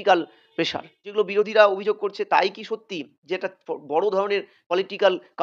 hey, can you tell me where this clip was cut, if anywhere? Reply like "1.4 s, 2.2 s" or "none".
1.0 s